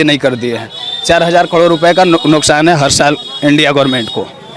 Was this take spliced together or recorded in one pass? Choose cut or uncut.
uncut